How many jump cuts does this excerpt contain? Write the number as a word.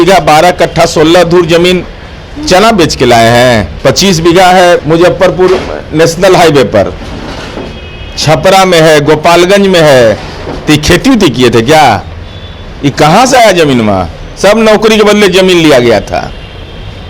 zero